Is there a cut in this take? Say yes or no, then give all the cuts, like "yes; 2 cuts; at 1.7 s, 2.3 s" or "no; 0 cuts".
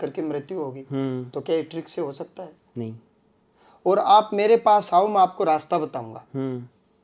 no; 0 cuts